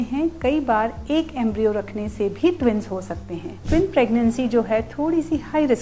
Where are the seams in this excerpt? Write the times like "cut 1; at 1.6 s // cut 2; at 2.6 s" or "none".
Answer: cut 1; at 3.6 s